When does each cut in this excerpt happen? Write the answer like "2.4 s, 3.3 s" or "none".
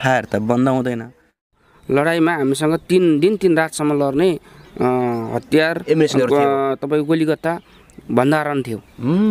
1.5 s